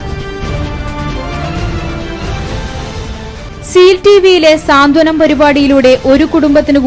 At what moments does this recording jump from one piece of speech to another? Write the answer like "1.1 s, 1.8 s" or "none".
3.4 s